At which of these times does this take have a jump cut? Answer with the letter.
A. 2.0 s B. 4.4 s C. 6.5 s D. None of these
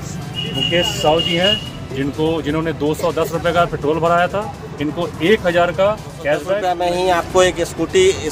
C